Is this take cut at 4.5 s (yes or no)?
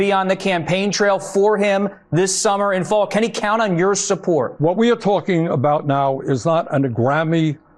yes